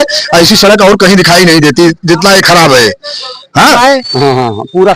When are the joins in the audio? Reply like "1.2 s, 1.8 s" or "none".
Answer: 3.8 s